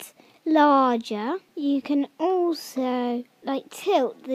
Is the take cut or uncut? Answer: cut